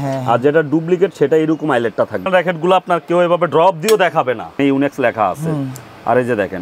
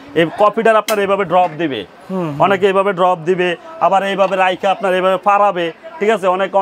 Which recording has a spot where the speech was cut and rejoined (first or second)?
first